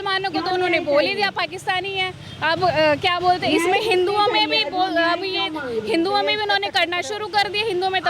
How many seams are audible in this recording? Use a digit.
0